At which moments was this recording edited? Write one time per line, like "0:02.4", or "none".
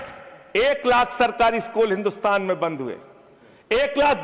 none